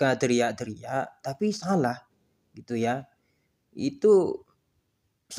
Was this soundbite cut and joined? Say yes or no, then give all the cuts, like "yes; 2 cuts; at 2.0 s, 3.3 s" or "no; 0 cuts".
no; 0 cuts